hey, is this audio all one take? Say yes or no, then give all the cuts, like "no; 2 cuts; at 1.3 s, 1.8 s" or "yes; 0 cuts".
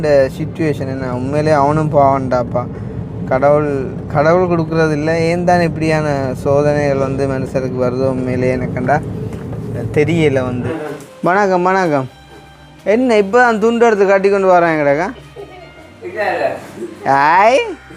no; 1 cut; at 10.7 s